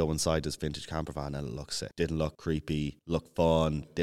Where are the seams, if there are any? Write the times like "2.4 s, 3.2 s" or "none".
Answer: 1.8 s, 2.7 s